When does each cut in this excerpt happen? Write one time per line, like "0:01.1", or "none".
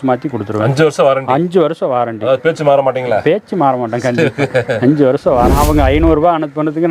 0:05.5